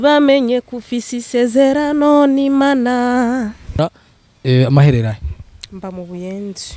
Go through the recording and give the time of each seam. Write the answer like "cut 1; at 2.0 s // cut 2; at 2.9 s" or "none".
cut 1; at 3.8 s